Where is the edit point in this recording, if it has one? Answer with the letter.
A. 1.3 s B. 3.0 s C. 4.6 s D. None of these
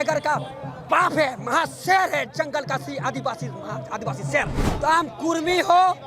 C